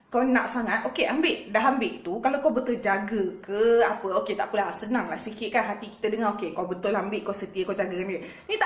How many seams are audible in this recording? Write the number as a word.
one